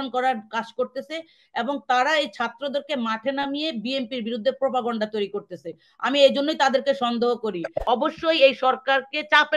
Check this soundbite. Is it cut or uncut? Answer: cut